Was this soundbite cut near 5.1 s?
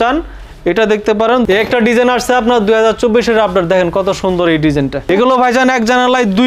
yes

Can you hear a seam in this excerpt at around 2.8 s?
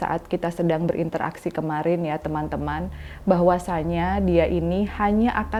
no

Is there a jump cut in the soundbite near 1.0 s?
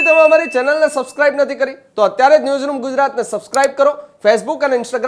no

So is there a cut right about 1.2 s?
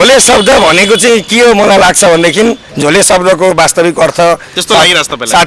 no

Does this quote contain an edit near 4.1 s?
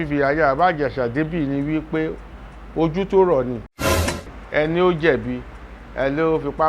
yes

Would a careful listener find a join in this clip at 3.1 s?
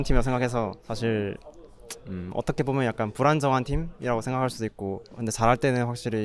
no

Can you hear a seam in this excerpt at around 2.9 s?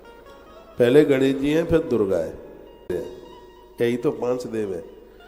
yes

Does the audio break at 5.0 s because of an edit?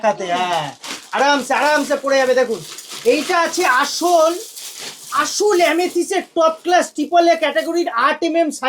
no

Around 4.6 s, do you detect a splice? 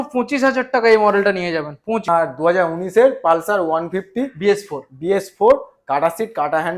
no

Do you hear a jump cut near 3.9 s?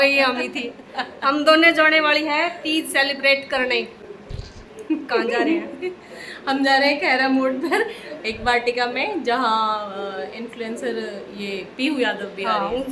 no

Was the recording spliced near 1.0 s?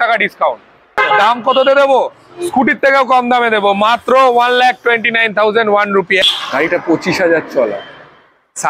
yes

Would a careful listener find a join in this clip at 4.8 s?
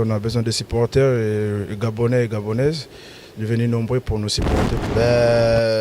yes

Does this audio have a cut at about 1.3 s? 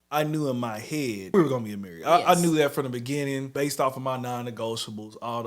yes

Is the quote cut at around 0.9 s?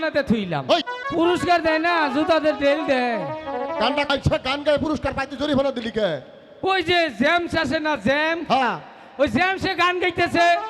yes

